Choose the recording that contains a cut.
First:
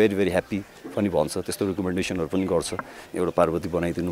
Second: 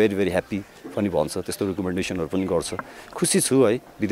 first; 1 cut; at 3.0 s

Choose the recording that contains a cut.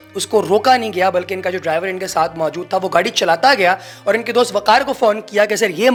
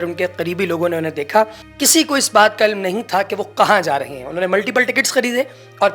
second; 1 cut; at 1.6 s

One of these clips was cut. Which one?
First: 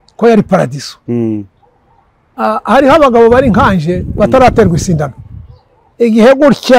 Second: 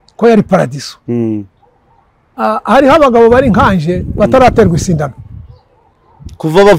first; 1 cut; at 5.8 s

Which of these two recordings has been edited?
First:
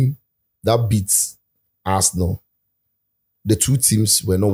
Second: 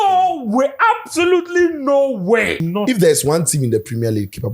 second; 1 cut; at 2.5 s

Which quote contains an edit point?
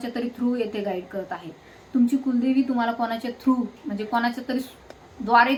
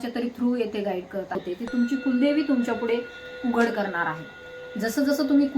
second; 1 cut; at 1.5 s

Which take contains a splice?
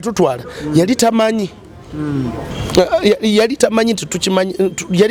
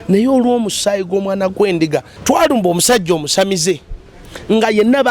second; 1 cut; at 2.1 s

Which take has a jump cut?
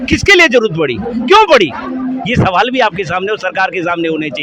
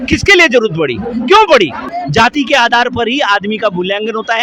second; 1 cut; at 1.8 s

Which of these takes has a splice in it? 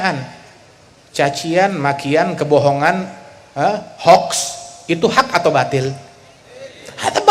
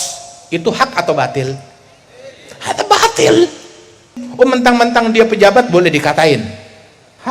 second; 1 cut; at 4.2 s

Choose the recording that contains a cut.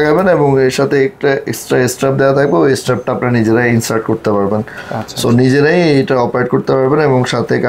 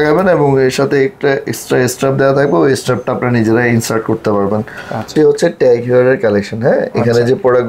second; 1 cut; at 5.1 s

